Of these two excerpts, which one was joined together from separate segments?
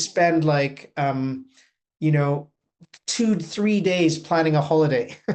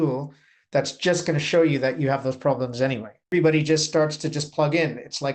second; 1 cut; at 3.3 s

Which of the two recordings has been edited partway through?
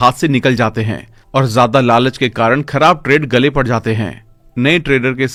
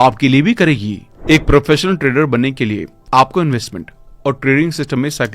second; 1 cut; at 1.1 s

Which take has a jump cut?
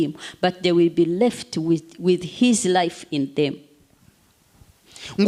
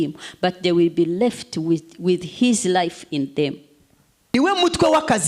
second; 1 cut; at 4.3 s

